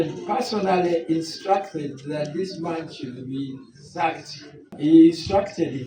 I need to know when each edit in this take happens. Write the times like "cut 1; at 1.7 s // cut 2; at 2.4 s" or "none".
cut 1; at 4.7 s